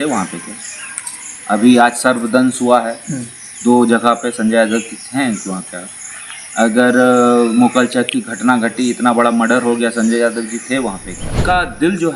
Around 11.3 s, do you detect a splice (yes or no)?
yes